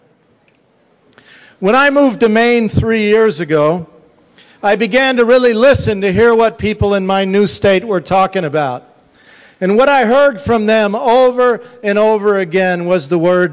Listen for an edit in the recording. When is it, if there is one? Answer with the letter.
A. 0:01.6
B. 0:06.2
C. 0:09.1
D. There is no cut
C